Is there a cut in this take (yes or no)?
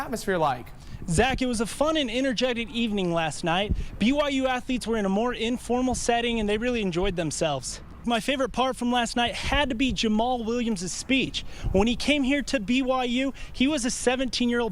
yes